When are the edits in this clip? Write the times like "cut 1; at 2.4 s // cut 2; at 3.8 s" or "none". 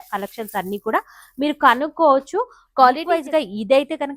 cut 1; at 3.2 s